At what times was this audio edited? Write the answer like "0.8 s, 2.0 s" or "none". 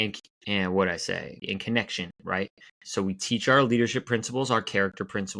1.5 s